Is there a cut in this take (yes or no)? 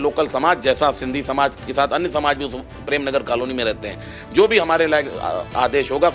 no